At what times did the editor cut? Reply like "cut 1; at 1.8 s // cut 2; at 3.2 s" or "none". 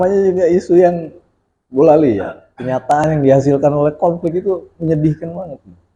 cut 1; at 3.0 s